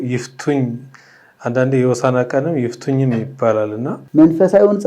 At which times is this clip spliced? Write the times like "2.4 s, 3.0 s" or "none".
4.0 s